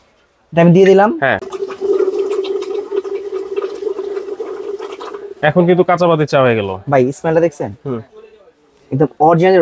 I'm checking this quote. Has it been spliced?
yes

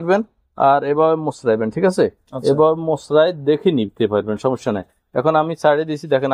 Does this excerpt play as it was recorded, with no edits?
yes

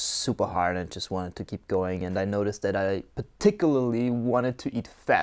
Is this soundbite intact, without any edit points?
yes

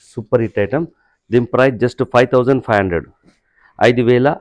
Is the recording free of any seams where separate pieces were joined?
yes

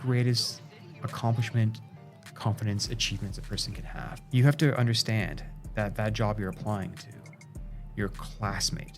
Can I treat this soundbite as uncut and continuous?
no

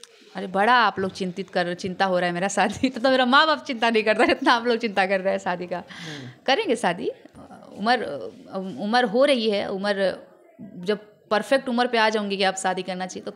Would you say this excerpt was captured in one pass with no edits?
yes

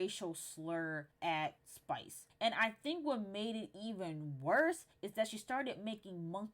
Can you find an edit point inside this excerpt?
yes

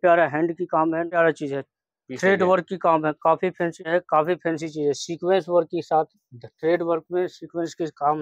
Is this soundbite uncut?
no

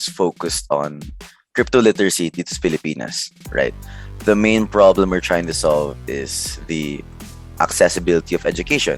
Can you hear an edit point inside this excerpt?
no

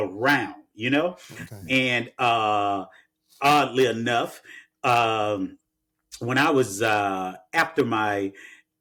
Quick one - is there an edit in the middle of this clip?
no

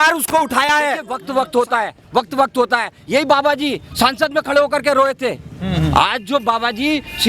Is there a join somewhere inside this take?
yes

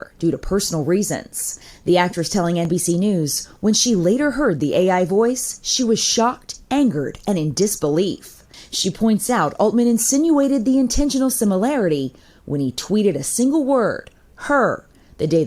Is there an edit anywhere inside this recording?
no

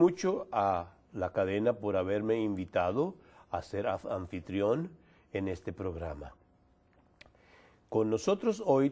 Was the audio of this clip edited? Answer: no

